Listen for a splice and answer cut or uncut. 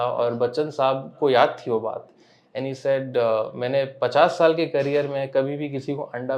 uncut